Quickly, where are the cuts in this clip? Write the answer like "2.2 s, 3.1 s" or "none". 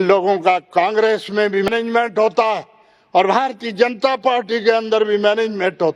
1.7 s